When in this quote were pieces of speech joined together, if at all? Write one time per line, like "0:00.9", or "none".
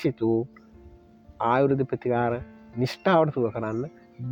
none